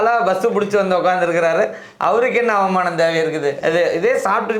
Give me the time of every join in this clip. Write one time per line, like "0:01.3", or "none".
none